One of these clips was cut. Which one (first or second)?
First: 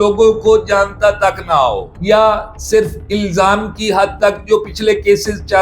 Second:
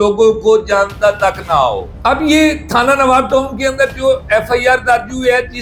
first